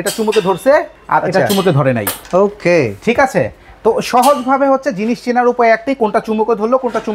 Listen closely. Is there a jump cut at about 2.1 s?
yes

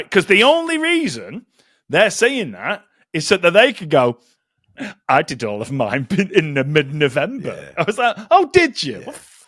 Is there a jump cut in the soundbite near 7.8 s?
no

